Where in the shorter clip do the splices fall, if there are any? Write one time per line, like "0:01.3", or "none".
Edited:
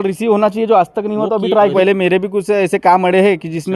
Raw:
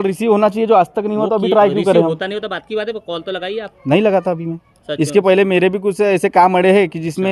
0:01.7